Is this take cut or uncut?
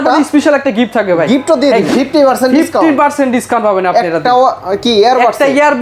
cut